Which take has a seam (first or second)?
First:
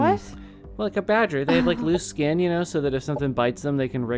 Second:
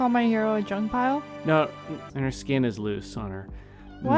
second